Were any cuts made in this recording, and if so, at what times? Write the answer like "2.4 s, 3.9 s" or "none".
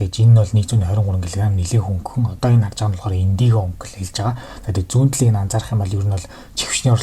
none